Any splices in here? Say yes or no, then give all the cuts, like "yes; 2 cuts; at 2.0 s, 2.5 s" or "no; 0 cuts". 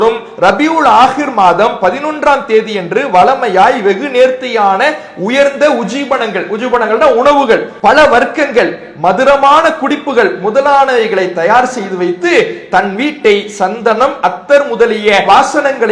no; 0 cuts